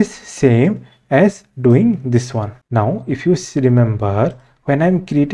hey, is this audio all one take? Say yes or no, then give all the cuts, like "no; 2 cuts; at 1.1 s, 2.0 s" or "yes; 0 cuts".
yes; 0 cuts